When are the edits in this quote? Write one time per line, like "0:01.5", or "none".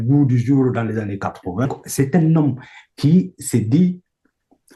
0:01.7